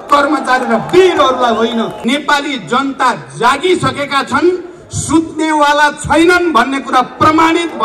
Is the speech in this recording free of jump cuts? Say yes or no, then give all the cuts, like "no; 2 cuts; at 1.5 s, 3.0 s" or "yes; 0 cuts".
no; 1 cut; at 2.0 s